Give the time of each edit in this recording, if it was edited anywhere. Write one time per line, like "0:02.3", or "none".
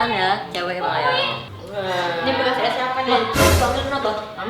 0:01.4